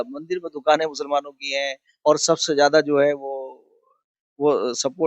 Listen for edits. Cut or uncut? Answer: uncut